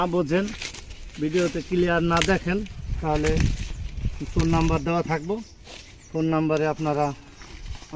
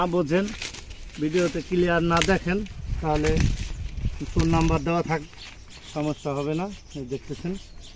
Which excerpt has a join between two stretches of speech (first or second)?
second